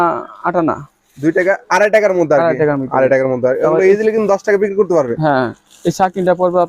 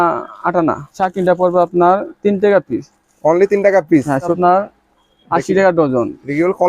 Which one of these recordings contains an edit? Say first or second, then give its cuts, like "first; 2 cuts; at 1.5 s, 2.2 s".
second; 2 cuts; at 1.0 s, 4.4 s